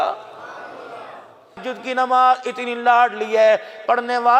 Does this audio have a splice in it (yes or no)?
yes